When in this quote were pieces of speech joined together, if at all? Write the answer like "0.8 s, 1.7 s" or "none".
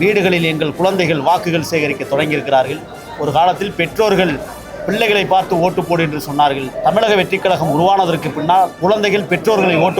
6.7 s, 8.7 s